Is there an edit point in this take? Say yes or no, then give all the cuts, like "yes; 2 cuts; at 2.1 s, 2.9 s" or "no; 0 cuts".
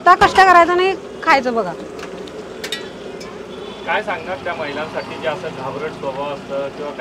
no; 0 cuts